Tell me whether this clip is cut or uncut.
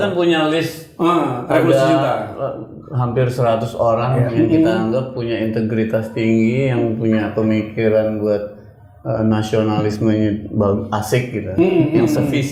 uncut